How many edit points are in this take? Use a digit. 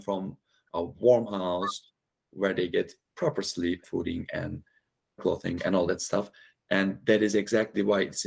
2